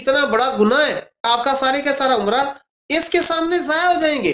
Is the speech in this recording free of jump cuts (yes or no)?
no